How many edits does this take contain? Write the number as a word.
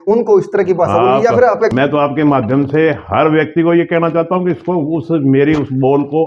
one